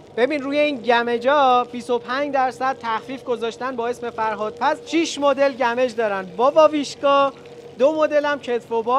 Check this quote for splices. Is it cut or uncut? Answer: uncut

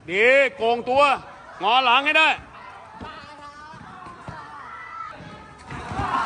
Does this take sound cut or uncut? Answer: cut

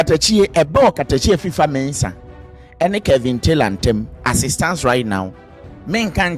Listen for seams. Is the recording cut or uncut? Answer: uncut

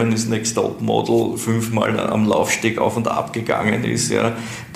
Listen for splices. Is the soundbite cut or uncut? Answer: uncut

